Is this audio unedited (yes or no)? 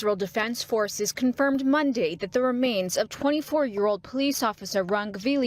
yes